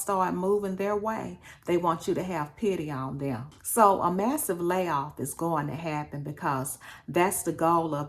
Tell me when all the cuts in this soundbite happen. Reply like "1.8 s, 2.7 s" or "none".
3.5 s